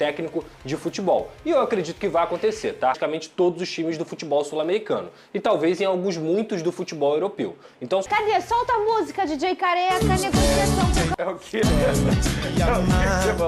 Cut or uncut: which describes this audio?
cut